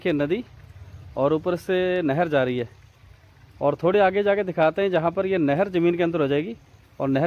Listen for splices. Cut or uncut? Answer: uncut